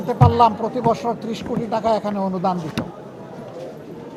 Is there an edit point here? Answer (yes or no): no